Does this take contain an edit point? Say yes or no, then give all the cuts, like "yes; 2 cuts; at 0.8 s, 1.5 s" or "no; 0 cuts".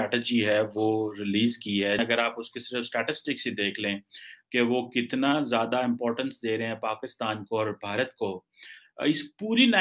yes; 1 cut; at 2.0 s